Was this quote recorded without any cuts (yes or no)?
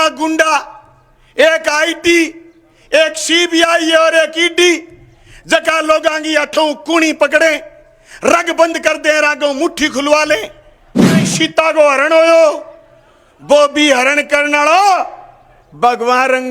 no